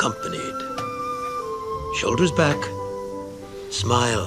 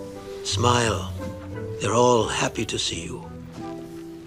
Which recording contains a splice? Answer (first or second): first